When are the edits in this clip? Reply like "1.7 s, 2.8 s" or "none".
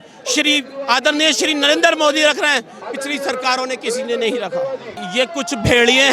5.0 s

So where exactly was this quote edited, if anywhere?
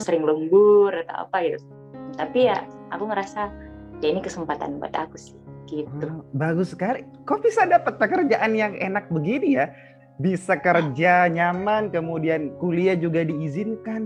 none

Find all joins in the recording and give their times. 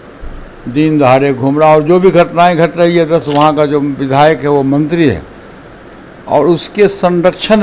3.3 s

